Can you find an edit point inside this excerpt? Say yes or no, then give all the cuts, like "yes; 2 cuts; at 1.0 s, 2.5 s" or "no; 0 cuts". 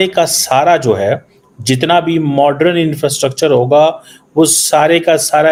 no; 0 cuts